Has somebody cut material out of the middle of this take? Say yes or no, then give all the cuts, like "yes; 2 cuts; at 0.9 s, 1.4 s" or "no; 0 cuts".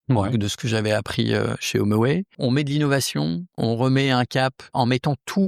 yes; 3 cuts; at 2.3 s, 3.6 s, 4.7 s